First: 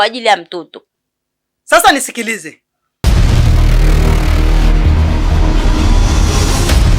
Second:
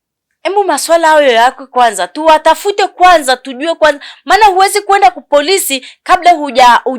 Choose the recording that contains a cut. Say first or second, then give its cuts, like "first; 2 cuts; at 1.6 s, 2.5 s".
first; 1 cut; at 3.1 s